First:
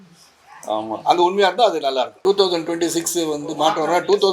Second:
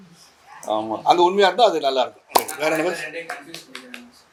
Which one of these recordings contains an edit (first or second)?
first